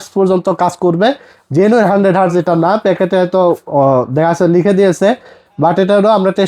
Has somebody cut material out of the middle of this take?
no; 0 cuts

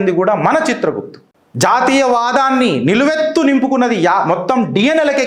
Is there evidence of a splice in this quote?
yes; 1 cut; at 1.2 s

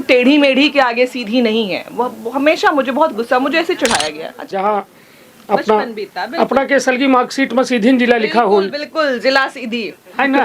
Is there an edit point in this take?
yes; 1 cut; at 4.4 s

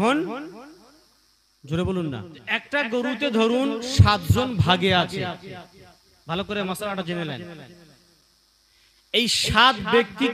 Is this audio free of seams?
no; 1 cut; at 2.3 s

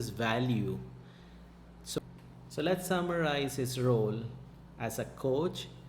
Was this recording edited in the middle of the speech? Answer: no; 0 cuts

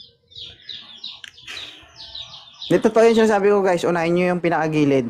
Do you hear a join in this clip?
no; 0 cuts

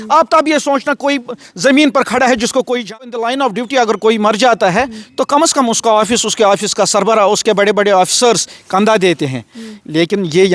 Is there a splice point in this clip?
yes; 1 cut; at 3.0 s

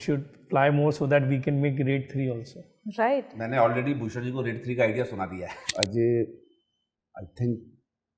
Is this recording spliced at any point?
yes; 1 cut; at 5.7 s

